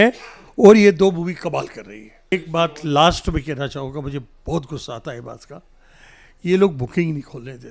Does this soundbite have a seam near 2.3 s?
yes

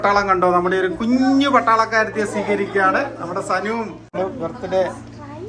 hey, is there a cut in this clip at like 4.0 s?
yes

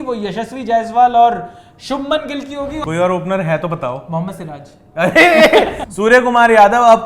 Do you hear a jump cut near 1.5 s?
no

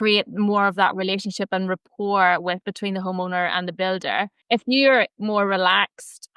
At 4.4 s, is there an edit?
yes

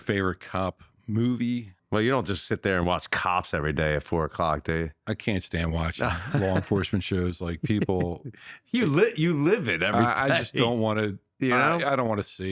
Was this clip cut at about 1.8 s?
yes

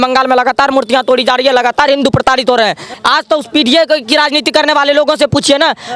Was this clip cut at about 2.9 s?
yes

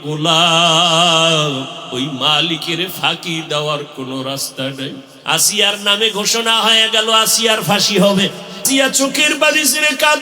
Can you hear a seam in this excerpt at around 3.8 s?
no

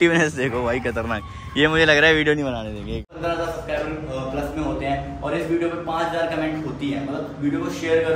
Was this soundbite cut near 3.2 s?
yes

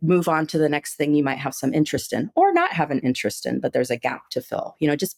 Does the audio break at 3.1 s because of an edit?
no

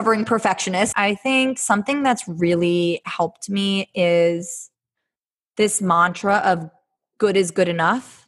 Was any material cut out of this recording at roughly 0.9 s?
yes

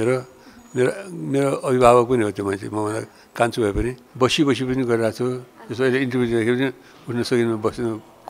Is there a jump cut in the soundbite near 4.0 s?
yes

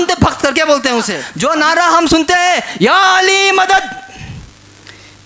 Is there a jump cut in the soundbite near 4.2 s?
no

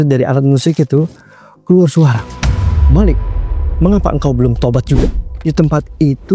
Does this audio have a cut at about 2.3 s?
no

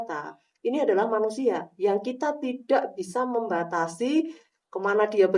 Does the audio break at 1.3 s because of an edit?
no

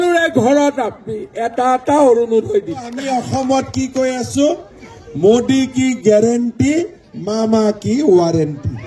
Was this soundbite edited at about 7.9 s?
no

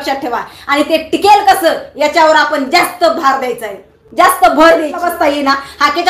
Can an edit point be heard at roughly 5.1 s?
yes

